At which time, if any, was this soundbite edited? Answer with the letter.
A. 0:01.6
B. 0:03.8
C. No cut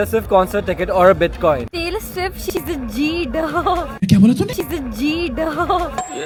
C